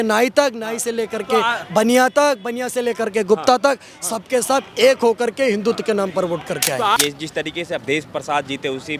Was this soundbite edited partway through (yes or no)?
yes